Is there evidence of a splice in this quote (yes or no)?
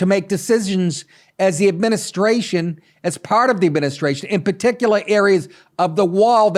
no